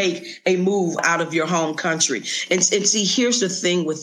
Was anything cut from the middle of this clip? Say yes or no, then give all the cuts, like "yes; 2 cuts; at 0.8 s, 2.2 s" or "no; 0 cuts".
yes; 1 cut; at 1.0 s